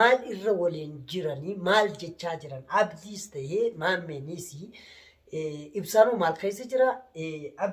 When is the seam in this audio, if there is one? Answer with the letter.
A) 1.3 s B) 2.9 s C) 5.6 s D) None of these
D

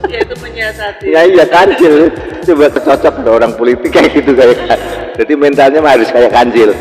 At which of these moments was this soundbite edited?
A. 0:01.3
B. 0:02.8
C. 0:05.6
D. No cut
B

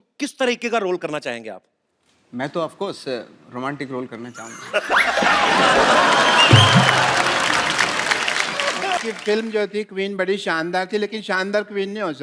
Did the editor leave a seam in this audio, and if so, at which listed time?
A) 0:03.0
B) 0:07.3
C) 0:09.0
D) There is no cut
C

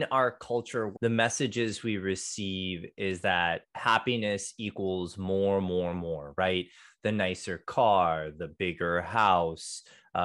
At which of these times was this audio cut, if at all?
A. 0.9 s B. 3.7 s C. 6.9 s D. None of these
A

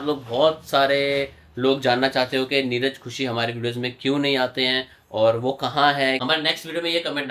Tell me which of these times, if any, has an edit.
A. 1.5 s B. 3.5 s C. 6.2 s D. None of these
C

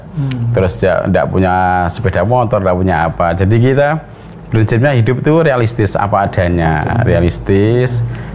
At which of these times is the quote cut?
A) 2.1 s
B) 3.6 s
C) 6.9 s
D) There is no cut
D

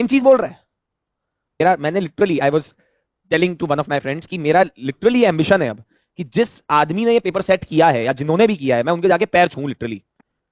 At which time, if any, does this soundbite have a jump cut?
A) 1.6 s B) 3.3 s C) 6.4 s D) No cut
A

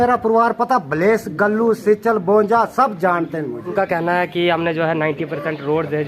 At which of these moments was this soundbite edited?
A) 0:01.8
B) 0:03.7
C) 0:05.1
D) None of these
B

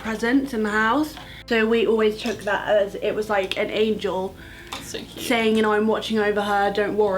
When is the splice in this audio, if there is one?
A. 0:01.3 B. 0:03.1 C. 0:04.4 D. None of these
A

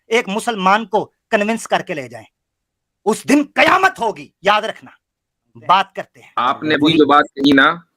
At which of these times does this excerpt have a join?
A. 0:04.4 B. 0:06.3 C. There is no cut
B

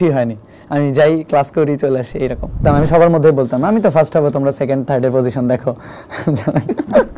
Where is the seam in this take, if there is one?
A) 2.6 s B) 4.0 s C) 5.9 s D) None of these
A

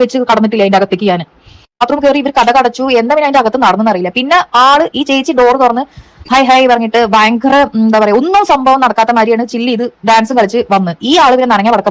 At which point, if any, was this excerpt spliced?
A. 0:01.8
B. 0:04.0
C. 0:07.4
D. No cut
A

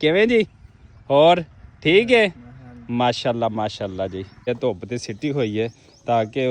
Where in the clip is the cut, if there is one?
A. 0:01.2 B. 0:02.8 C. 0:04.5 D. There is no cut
C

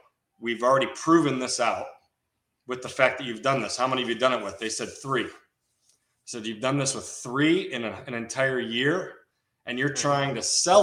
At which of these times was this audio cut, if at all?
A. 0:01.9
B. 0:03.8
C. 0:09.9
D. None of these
D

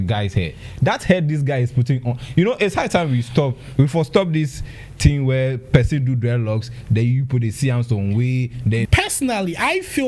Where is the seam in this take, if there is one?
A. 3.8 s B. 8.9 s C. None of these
B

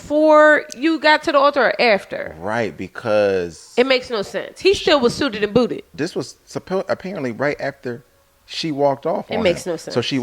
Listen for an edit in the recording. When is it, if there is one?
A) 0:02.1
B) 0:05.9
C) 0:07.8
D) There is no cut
B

